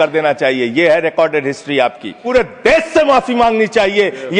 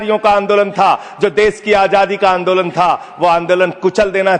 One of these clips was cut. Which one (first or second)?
first